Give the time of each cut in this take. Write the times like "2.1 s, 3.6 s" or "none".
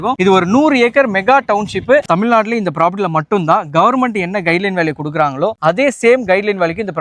2.0 s